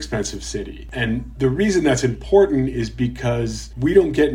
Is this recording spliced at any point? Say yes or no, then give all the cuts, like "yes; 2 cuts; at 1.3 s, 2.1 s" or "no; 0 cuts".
no; 0 cuts